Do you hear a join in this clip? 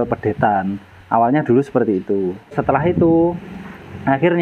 yes; 1 cut; at 2.6 s

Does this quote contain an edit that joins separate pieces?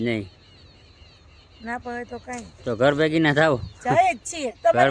no; 0 cuts

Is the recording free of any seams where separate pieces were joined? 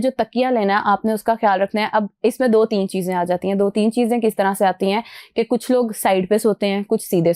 yes; 0 cuts

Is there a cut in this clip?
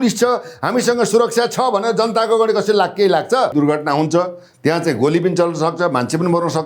yes; 1 cut; at 3.5 s

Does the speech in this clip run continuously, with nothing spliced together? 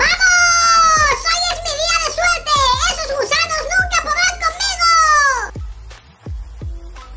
yes; 0 cuts

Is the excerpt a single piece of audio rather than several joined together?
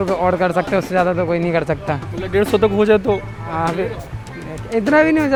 yes; 0 cuts

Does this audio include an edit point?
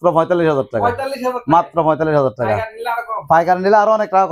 no; 0 cuts

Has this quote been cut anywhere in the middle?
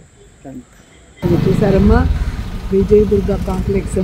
yes; 1 cut; at 1.2 s

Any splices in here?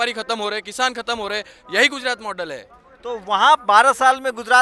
no; 0 cuts

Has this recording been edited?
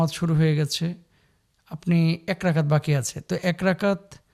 no; 0 cuts

